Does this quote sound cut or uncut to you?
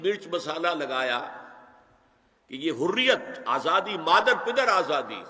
uncut